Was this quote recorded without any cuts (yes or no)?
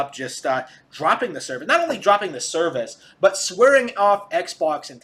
yes